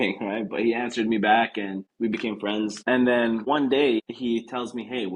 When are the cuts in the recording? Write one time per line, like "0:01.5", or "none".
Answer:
0:01.9
0:02.8
0:03.4
0:04.1